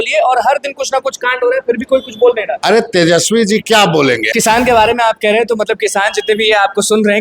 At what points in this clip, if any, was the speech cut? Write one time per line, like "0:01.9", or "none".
0:04.3